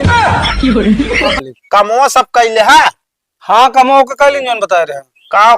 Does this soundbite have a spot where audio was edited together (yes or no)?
yes